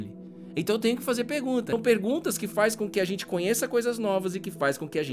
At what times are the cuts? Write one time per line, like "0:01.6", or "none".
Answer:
0:01.7